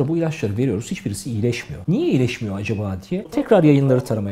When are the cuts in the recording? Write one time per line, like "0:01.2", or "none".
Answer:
0:01.7
0:03.3